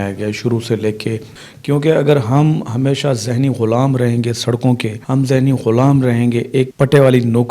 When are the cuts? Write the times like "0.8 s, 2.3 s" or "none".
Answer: 1.3 s, 4.9 s